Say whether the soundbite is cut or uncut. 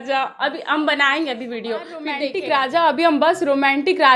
cut